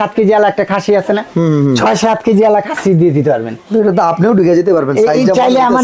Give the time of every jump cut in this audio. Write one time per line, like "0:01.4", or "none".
none